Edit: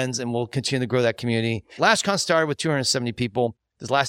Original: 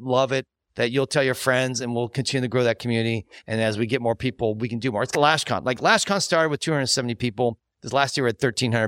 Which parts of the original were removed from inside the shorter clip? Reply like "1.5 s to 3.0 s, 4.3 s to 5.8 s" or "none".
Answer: 3.4 s to 5.8 s